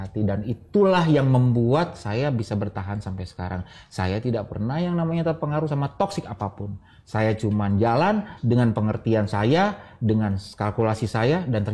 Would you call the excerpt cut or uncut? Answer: uncut